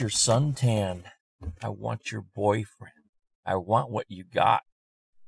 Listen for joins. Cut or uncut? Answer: uncut